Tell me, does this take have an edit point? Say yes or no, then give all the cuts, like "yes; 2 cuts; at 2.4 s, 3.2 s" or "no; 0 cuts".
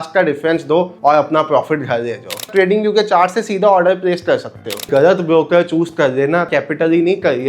yes; 3 cuts; at 2.5 s, 4.9 s, 6.5 s